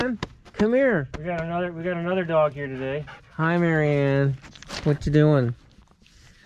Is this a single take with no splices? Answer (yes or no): yes